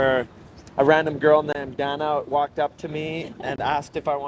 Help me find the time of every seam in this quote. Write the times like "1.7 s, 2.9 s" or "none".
none